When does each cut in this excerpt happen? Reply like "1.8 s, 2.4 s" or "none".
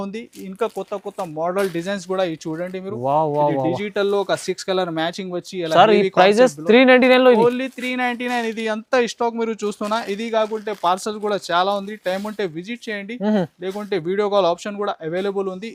none